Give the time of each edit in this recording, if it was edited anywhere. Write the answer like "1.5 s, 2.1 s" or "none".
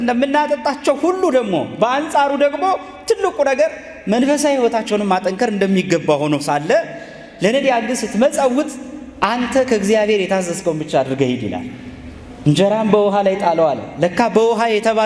none